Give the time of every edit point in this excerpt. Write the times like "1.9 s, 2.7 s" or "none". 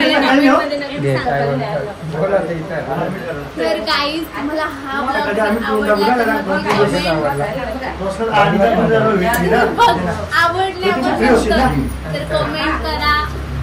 none

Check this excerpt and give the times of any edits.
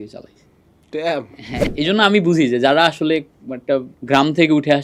1.7 s, 3.9 s

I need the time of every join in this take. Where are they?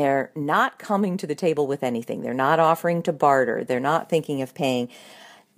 3.6 s

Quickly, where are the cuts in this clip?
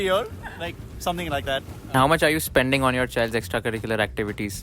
1.9 s

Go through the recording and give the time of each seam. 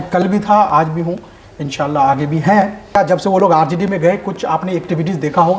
3.0 s

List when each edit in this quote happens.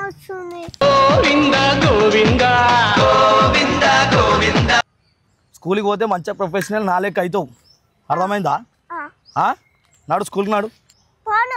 4.8 s

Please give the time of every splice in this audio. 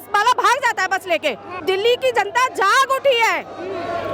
1.6 s

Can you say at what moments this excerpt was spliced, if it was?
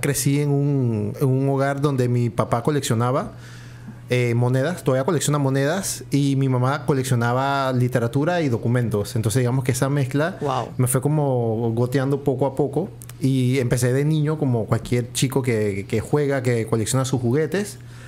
none

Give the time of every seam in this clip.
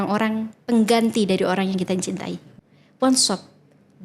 2.5 s

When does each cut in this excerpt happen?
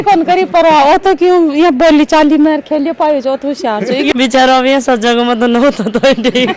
4.1 s

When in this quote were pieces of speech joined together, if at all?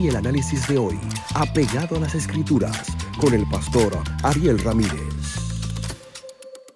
none

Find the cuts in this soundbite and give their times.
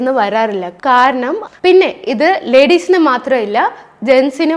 1.4 s

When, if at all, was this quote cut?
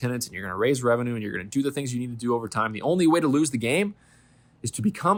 none

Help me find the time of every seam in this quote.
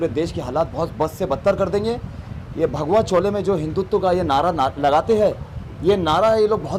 none

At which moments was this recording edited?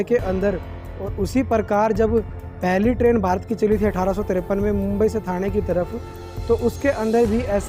none

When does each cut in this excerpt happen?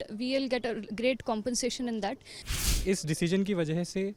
2.7 s

